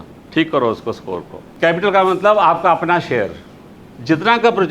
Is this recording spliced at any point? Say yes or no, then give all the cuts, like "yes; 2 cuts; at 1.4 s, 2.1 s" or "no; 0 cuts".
yes; 1 cut; at 1.4 s